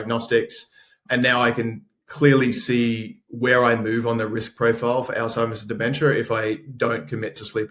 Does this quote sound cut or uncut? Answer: uncut